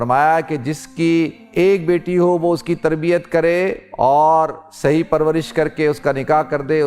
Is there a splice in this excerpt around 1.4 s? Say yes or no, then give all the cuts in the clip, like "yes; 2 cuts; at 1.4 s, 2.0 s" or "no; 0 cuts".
yes; 2 cuts; at 1.4 s, 3.8 s